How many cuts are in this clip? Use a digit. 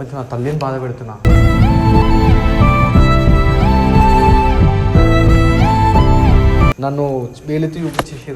1